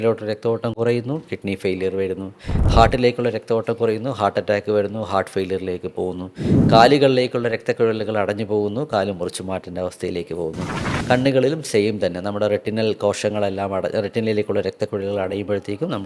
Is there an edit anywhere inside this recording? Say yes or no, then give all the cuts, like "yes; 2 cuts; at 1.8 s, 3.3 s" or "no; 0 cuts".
no; 0 cuts